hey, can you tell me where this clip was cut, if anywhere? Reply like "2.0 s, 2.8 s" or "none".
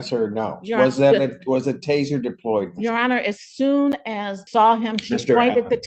4.4 s